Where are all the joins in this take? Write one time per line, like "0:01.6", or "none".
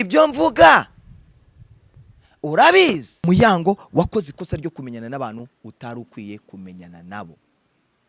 0:03.1

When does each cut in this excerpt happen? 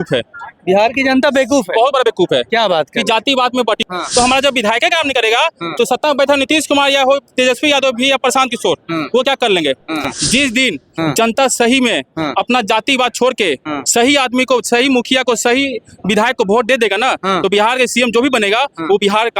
0:03.8
0:10.1

